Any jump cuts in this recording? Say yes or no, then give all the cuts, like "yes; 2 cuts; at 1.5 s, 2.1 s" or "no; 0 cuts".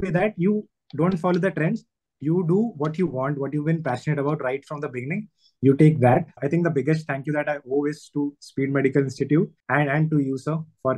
yes; 2 cuts; at 6.4 s, 9.6 s